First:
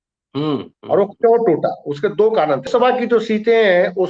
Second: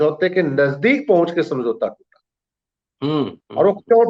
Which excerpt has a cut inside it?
first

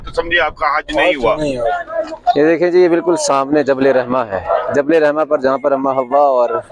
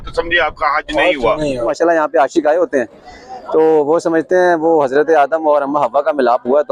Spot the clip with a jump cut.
second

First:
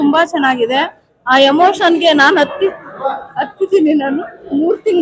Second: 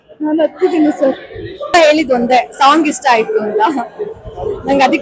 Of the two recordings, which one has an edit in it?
second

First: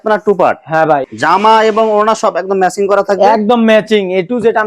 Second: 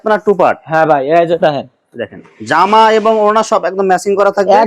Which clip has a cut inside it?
first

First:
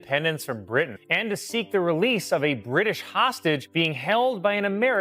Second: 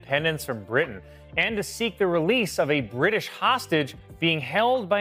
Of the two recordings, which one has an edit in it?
first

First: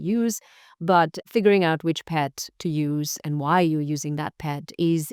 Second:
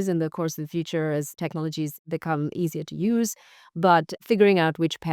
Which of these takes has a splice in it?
second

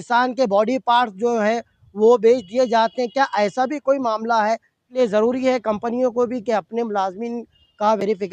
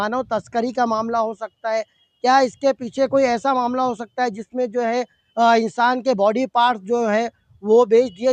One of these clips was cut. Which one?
first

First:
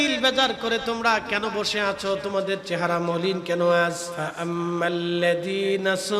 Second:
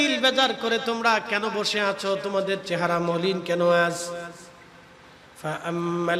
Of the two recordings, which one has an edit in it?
first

